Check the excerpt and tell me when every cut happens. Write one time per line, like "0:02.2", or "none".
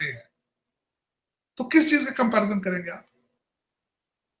none